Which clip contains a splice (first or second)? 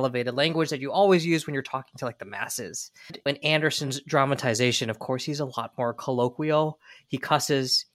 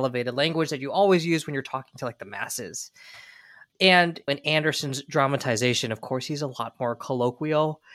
first